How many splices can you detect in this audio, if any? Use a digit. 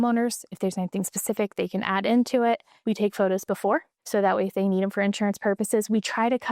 2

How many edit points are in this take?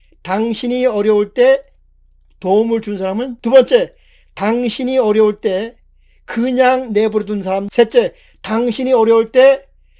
2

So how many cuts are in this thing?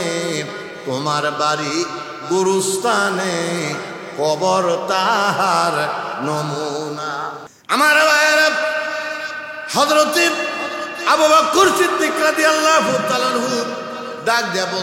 1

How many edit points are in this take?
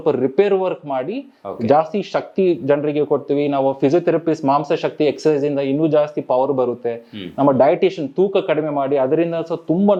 0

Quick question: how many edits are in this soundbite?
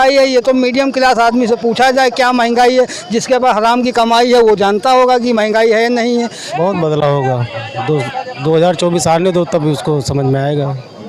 1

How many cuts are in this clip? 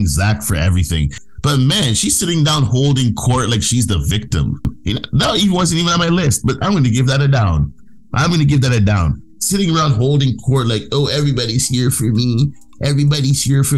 2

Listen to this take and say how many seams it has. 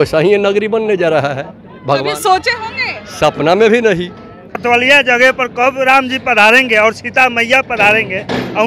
1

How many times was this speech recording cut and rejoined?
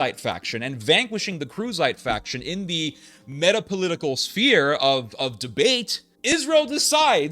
1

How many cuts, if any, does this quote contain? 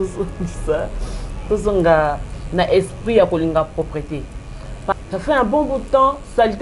1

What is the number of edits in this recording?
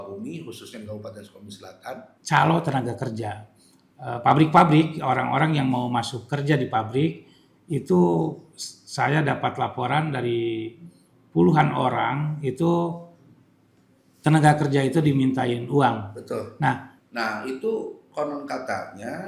2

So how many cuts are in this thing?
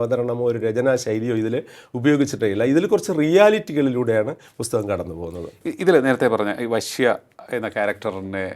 0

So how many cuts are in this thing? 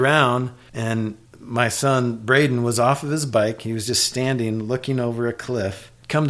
1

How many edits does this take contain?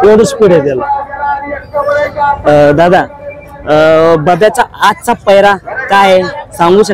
0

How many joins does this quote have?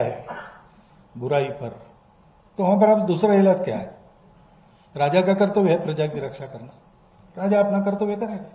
0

